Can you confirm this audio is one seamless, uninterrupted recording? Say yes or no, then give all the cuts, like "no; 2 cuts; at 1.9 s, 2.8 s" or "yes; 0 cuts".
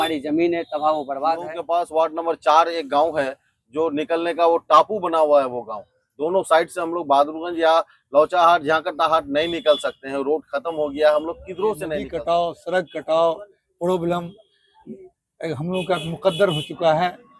no; 2 cuts; at 1.6 s, 12.0 s